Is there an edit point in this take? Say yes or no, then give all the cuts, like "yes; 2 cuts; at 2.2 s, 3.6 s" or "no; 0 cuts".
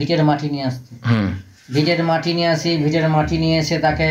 no; 0 cuts